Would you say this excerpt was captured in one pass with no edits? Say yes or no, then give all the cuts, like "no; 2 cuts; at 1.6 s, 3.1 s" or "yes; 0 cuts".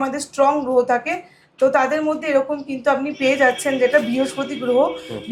yes; 0 cuts